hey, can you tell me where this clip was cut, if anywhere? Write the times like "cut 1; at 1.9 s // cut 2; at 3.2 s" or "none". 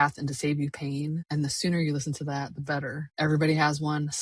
cut 1; at 1.2 s // cut 2; at 3.0 s